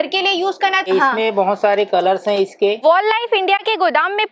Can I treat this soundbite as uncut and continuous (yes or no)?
no